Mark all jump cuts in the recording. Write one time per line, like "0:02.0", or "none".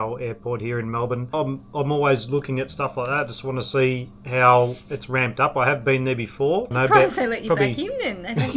0:01.3
0:06.7